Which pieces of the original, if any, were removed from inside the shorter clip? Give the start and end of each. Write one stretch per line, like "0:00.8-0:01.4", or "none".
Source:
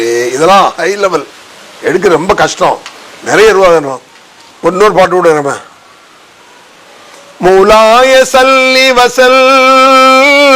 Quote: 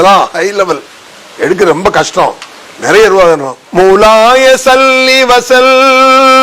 0:04.0-0:07.2